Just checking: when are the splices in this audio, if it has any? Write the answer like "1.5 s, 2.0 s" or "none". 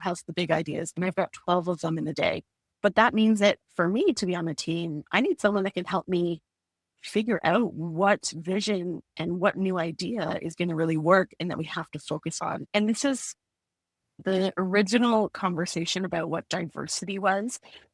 12.6 s